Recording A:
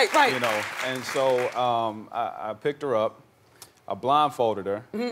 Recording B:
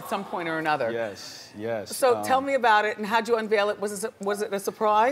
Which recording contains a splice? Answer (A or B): B